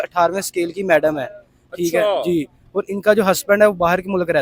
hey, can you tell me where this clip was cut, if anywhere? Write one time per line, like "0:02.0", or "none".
none